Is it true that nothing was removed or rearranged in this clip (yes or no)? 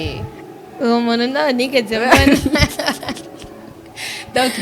yes